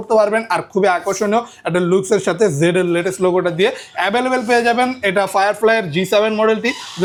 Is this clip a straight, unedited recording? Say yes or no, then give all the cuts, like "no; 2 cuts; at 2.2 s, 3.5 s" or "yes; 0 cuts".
yes; 0 cuts